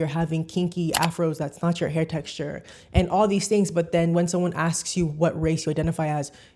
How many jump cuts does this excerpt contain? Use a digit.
0